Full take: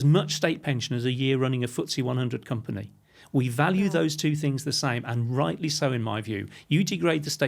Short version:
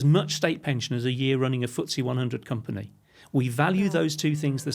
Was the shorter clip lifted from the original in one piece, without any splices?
yes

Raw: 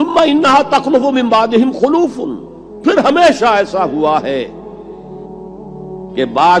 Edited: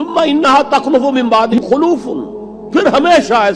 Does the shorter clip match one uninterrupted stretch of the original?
no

